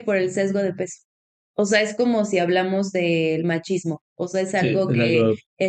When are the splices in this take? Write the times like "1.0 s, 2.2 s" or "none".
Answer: none